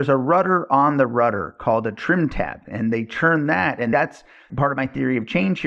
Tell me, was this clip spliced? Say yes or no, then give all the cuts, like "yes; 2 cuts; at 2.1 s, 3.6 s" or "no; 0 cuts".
yes; 1 cut; at 3.9 s